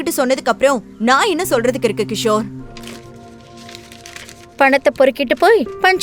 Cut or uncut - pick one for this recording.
cut